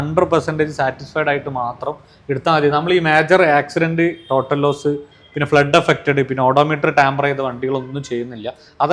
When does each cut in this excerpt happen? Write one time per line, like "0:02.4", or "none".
none